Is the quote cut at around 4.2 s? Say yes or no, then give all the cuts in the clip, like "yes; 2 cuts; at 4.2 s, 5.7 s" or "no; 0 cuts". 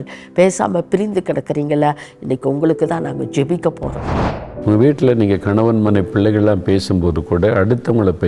yes; 1 cut; at 4.2 s